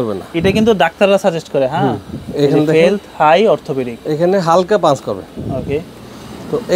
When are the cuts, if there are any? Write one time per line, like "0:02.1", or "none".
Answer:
none